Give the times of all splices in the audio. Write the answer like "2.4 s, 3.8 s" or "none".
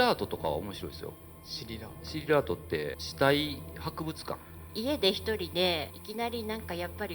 3.0 s, 4.6 s, 5.9 s